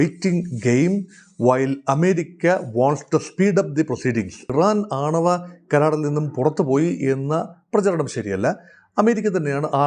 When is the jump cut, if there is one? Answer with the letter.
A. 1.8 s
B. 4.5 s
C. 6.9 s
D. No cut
B